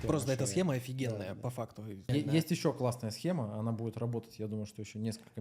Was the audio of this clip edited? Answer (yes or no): yes